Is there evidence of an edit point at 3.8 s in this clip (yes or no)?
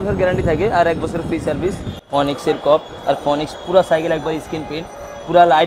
no